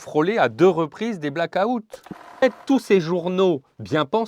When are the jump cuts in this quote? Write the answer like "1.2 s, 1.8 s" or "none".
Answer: 2.4 s